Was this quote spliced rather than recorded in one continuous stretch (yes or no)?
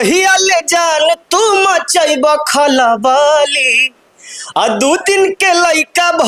no